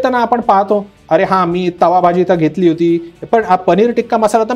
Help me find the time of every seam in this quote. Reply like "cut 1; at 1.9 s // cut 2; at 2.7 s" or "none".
none